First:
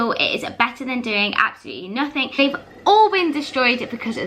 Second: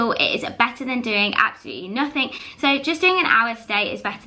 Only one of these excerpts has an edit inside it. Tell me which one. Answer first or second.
first